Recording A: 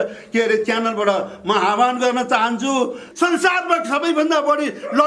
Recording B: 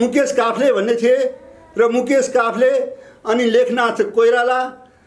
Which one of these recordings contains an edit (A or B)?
A